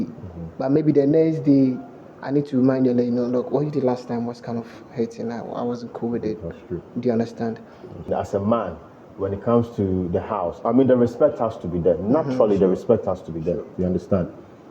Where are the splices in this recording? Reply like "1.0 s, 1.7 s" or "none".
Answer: 8.1 s

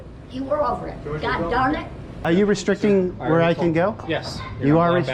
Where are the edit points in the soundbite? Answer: 2.2 s

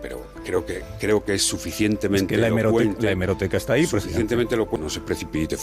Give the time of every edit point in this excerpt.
4.7 s

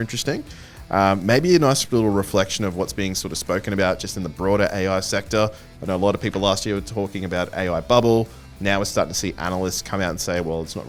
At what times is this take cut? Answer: none

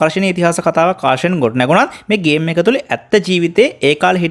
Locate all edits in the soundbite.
none

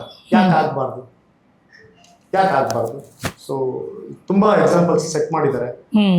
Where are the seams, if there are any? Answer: none

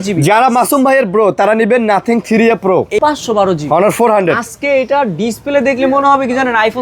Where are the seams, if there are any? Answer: 3.0 s

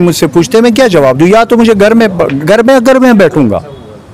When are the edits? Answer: none

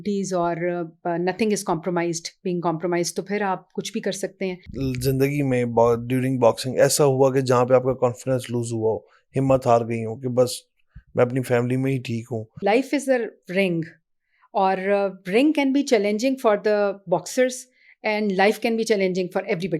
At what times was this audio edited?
4.7 s, 12.6 s

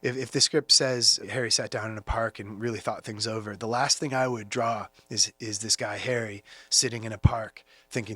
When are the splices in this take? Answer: 1.2 s

